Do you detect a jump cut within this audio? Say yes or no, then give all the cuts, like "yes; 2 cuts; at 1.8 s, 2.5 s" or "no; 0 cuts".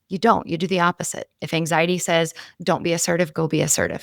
yes; 1 cut; at 2.5 s